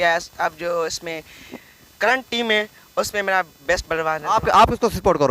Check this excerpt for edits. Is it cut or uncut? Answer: uncut